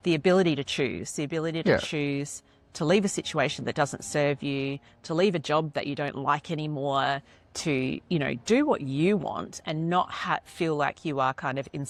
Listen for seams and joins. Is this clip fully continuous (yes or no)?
yes